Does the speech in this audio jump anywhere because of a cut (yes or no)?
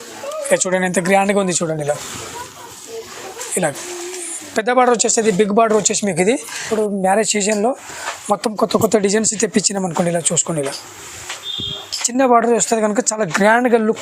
yes